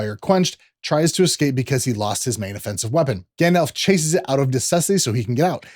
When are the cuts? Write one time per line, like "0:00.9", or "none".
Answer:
0:03.3